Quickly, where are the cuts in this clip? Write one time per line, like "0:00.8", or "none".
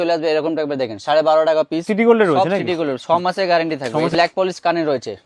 0:01.9
0:04.1